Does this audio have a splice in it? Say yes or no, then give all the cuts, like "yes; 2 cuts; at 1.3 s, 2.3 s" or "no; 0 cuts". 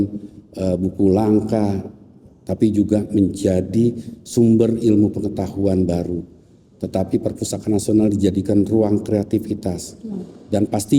no; 0 cuts